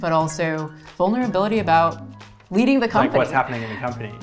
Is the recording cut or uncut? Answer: uncut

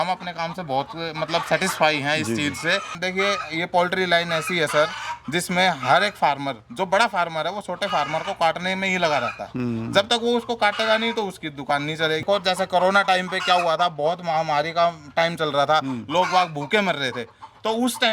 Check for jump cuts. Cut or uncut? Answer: cut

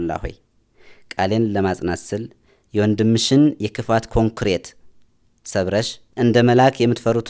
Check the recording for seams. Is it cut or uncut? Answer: cut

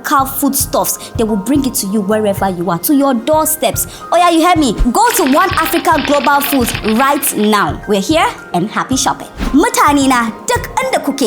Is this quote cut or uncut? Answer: cut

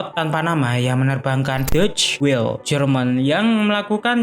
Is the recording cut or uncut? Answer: cut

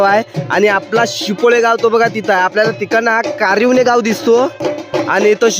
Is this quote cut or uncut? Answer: uncut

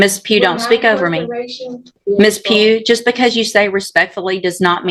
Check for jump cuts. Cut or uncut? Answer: cut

